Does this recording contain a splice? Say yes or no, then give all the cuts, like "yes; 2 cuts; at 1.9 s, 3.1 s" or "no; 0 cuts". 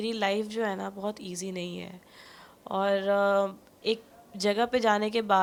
no; 0 cuts